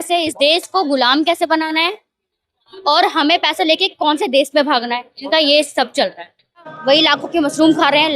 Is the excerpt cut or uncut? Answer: cut